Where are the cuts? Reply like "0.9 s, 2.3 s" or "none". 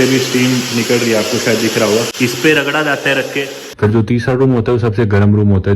3.6 s